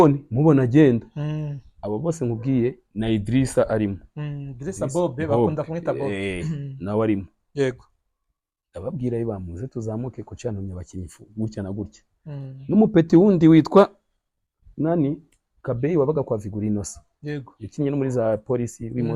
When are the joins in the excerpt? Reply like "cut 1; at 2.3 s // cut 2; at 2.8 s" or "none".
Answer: none